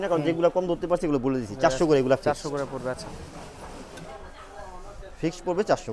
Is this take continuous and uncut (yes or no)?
yes